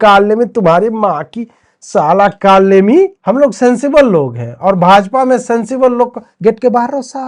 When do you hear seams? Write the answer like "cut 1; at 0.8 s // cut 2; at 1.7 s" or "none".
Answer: cut 1; at 3.2 s